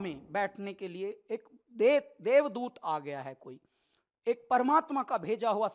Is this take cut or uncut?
uncut